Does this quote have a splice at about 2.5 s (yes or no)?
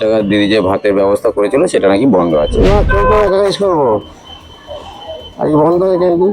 yes